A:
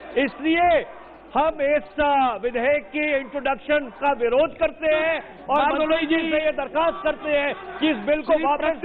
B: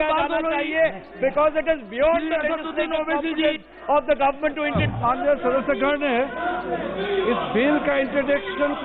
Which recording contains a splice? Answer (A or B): B